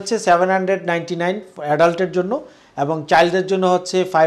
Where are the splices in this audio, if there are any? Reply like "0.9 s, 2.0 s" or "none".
none